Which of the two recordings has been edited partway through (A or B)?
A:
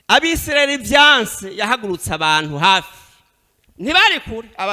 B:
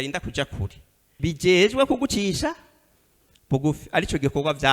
B